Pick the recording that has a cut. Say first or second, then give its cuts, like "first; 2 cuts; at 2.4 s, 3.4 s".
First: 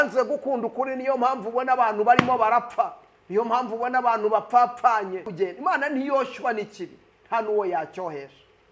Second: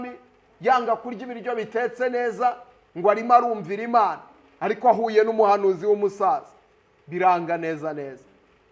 first; 1 cut; at 5.3 s